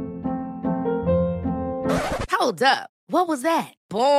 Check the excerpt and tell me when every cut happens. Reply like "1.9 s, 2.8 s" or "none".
none